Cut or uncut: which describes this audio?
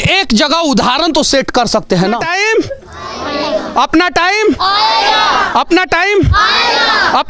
cut